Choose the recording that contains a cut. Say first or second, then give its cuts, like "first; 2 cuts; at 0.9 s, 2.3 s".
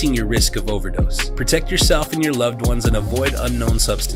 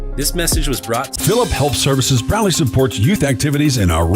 second; 1 cut; at 1.1 s